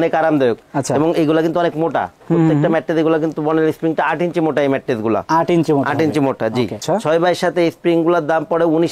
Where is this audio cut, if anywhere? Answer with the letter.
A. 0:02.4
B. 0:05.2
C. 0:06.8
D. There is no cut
C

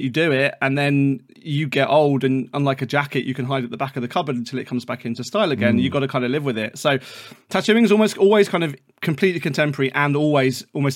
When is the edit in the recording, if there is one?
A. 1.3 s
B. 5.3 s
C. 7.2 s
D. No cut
D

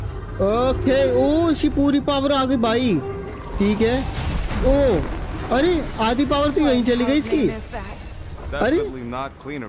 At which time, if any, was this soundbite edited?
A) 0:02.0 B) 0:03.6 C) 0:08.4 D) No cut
D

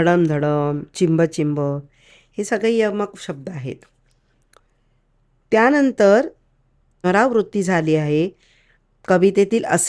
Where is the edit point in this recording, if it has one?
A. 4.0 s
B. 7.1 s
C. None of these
B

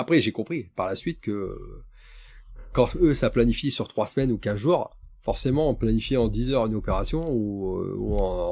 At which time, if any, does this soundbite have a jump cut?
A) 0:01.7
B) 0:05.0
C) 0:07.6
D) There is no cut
D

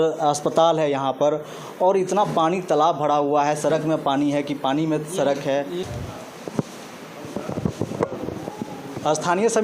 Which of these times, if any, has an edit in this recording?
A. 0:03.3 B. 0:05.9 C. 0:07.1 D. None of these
B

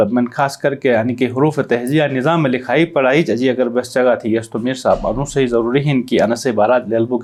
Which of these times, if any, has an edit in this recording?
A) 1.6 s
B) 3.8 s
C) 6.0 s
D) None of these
D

